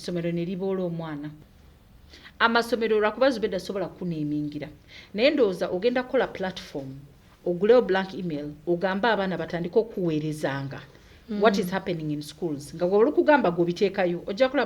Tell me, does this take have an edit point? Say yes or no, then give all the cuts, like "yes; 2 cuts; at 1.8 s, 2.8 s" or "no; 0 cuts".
yes; 1 cut; at 1.3 s